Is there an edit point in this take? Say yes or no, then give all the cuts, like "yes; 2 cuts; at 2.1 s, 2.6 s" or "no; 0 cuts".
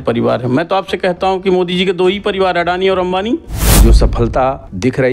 yes; 1 cut; at 3.7 s